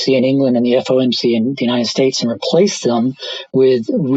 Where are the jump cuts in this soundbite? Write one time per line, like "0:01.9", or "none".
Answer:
none